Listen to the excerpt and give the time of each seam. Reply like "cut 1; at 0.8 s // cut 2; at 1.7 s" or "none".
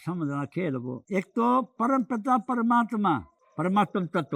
cut 1; at 1.0 s // cut 2; at 3.4 s